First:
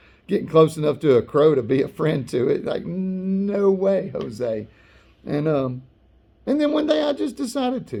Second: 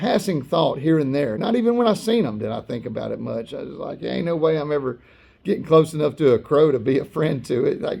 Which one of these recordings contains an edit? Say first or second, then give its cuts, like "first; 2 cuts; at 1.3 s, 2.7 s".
second; 1 cut; at 1.4 s